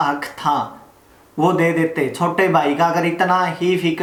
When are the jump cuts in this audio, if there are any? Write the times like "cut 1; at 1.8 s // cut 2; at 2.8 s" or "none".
none